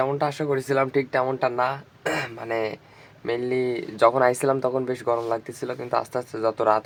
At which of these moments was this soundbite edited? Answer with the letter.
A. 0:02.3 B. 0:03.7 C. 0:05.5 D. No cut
D